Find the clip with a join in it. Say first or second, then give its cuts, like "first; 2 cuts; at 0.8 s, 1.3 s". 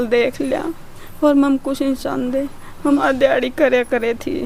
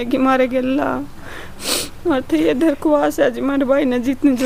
first; 1 cut; at 2.8 s